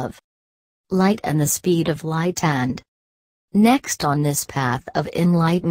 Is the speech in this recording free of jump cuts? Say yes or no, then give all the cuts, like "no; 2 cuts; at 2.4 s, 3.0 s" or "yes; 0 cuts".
yes; 0 cuts